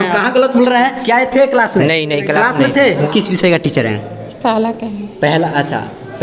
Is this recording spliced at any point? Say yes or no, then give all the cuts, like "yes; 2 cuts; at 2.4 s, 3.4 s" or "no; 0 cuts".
yes; 1 cut; at 3.1 s